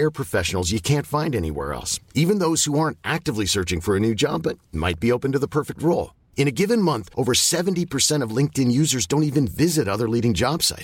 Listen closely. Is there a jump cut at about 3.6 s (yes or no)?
no